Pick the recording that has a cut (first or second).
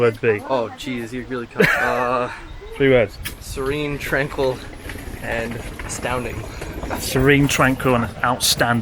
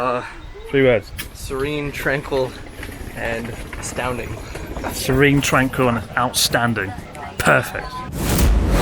second